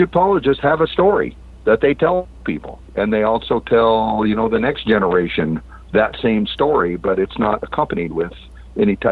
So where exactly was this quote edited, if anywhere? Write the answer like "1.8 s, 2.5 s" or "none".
none